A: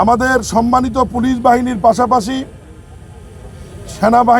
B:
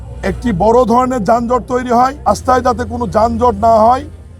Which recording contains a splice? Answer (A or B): B